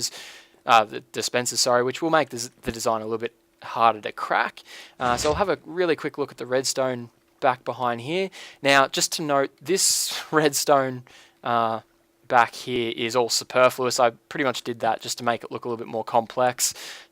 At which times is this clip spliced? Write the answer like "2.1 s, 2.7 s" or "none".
16.1 s